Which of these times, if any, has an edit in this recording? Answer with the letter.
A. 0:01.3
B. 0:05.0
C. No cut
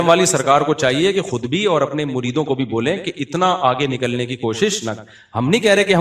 C